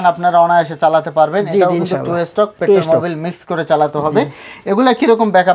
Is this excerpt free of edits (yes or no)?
yes